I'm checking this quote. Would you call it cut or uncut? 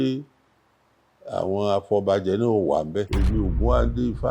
cut